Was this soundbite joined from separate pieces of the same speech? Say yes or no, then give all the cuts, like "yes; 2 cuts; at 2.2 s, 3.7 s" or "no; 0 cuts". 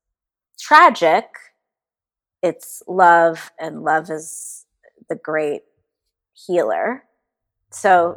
no; 0 cuts